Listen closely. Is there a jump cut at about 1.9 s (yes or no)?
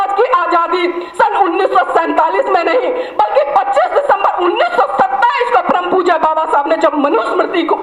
no